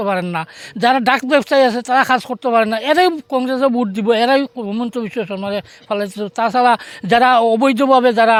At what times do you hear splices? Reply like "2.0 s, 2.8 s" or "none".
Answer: none